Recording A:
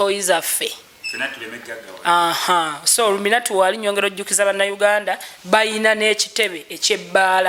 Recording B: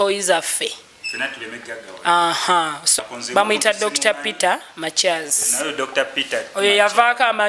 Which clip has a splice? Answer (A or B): B